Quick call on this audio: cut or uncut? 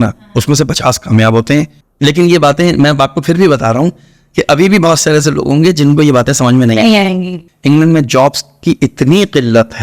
cut